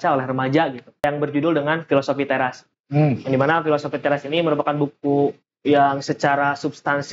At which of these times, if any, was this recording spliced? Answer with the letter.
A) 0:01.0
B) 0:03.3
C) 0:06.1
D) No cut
A